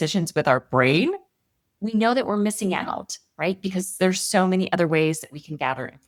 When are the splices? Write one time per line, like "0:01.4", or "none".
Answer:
none